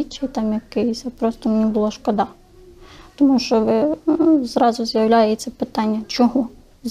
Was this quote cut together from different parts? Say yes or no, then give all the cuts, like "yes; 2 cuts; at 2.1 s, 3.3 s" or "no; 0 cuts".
no; 0 cuts